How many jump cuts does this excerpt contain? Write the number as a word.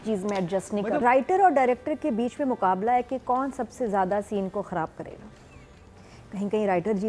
one